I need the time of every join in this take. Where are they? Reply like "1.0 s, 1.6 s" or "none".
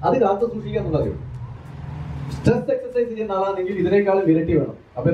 1.6 s